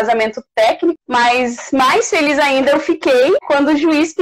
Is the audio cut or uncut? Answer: cut